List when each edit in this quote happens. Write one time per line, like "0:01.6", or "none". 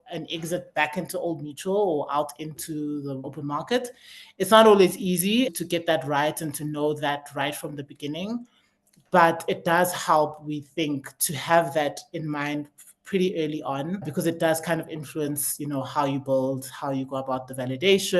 0:03.3
0:05.5
0:14.1